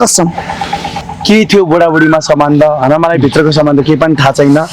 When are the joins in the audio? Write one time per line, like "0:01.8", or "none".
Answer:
0:01.1